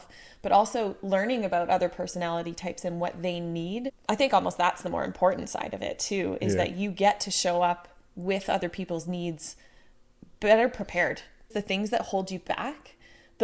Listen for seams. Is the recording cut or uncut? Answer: cut